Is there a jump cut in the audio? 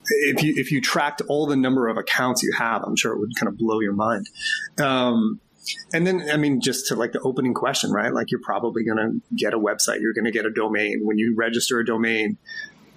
no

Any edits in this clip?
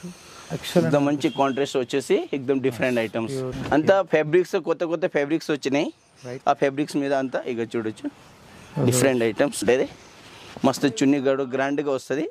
yes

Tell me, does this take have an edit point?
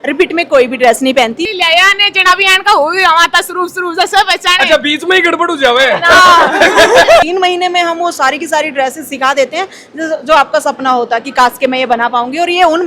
yes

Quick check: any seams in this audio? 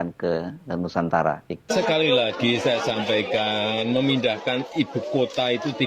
yes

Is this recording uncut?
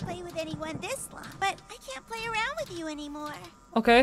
no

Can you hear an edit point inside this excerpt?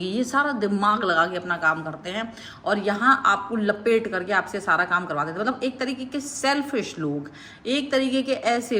no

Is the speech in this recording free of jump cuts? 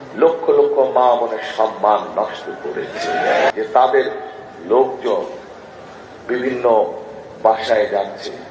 no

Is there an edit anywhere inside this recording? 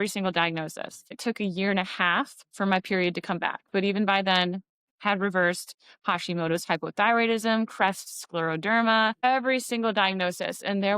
yes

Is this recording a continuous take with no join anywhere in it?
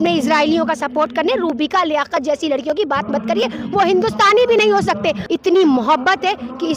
no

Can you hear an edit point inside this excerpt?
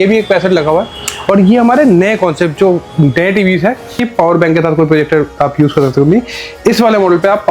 yes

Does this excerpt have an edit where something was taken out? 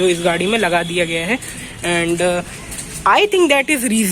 no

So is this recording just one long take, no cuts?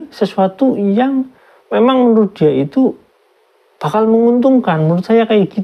yes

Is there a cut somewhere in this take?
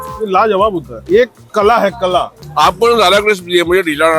yes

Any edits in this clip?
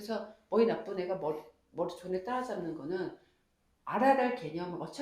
no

